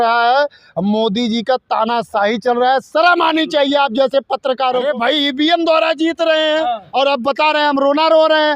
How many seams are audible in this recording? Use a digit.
1